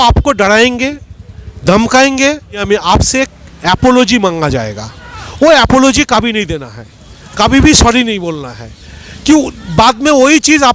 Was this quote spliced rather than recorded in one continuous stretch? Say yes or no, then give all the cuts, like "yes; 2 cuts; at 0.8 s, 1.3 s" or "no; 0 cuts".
yes; 1 cut; at 2.6 s